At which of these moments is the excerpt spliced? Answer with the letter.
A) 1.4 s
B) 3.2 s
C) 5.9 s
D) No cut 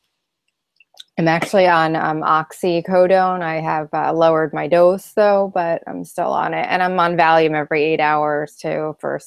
C